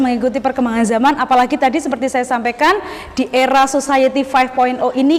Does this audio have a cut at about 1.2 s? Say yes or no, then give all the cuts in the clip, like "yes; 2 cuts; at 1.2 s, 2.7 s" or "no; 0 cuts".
no; 0 cuts